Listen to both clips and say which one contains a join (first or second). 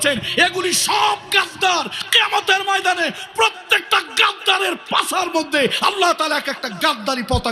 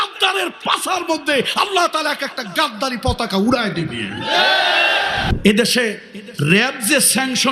second